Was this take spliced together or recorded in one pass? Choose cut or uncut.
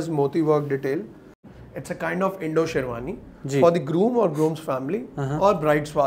cut